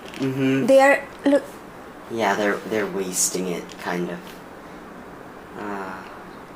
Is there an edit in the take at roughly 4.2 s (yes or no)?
no